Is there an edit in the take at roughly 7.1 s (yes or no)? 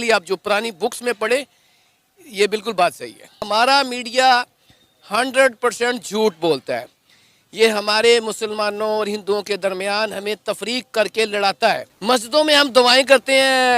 no